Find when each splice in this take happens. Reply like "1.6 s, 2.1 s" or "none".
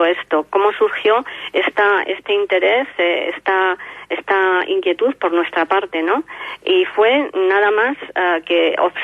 none